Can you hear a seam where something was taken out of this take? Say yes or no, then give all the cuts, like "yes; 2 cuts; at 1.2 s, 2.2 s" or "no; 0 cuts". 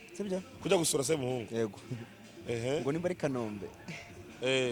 no; 0 cuts